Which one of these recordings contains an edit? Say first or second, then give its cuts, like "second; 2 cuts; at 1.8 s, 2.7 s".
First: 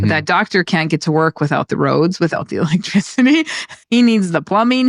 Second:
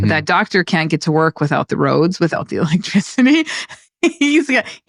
first; 1 cut; at 3.8 s